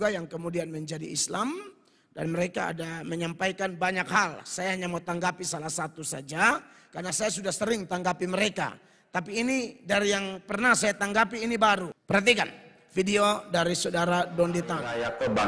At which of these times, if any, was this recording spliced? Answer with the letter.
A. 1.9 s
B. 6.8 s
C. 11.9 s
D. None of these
C